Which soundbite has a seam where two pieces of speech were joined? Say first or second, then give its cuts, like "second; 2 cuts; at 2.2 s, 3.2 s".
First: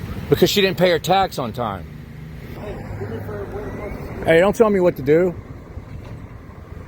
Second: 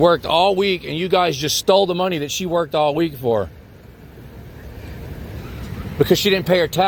first; 1 cut; at 2.6 s